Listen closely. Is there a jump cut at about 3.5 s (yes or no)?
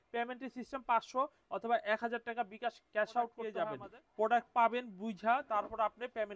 yes